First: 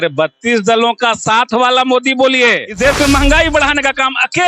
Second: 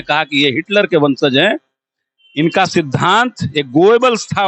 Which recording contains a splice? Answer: first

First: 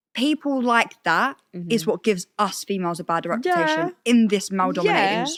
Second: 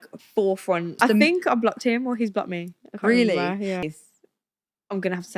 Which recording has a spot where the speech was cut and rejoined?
second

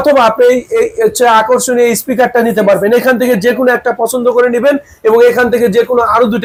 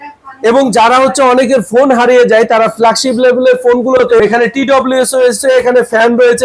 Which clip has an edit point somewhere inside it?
second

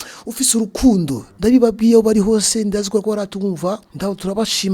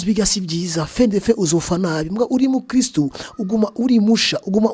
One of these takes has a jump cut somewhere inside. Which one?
first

